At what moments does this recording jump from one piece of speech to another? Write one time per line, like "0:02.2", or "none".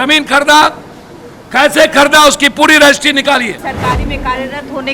0:03.6